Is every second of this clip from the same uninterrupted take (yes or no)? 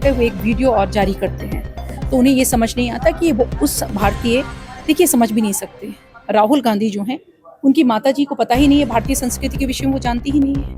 yes